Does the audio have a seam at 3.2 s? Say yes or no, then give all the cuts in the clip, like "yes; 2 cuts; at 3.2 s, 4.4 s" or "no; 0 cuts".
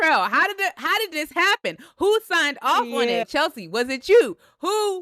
yes; 1 cut; at 3.2 s